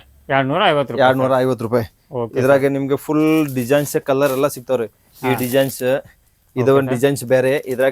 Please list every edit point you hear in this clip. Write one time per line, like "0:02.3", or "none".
none